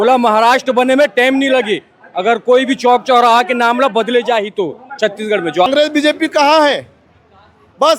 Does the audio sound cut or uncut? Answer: cut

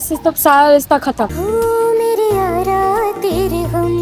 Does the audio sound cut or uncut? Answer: uncut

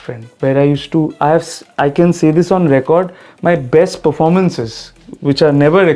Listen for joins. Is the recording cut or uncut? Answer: uncut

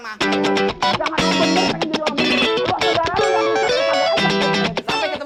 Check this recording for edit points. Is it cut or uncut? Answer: uncut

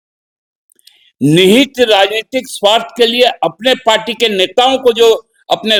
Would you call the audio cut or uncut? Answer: uncut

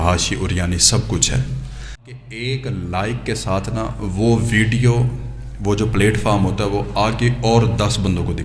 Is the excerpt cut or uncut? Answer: cut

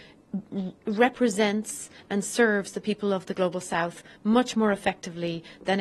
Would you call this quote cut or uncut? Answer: uncut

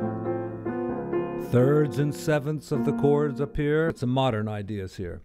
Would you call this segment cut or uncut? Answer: cut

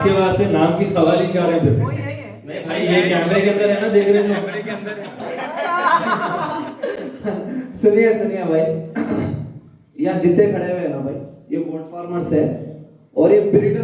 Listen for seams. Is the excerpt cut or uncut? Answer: uncut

